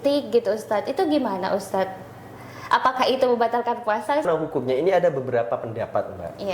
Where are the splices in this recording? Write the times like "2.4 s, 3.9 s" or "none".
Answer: 4.3 s